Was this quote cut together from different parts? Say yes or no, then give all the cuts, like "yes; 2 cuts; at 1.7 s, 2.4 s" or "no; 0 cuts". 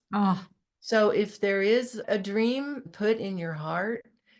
yes; 2 cuts; at 2.0 s, 2.8 s